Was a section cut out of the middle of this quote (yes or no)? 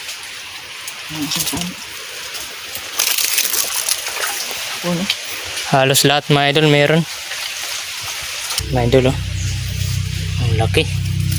yes